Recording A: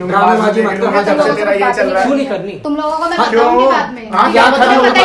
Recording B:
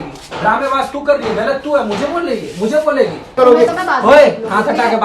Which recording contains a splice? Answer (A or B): B